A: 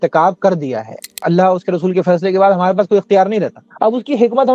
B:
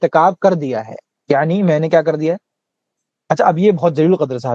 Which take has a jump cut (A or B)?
A